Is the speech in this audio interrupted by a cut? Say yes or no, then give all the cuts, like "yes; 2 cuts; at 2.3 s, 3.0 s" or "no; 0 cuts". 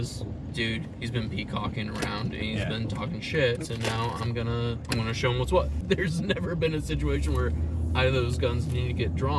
yes; 3 cuts; at 3.6 s, 4.8 s, 5.8 s